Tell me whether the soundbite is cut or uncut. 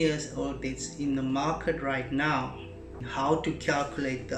cut